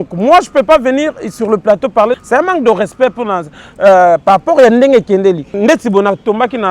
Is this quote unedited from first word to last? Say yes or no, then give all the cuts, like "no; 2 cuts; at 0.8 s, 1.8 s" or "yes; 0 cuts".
no; 2 cuts; at 2.2 s, 5.5 s